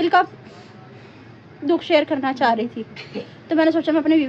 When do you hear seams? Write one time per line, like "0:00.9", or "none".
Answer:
none